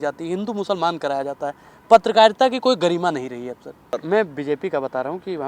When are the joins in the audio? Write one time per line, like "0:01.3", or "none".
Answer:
0:04.0